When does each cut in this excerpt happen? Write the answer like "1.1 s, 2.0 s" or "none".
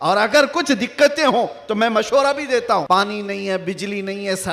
2.8 s